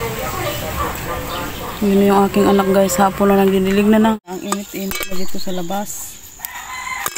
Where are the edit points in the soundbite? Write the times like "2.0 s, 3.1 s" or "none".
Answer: 4.1 s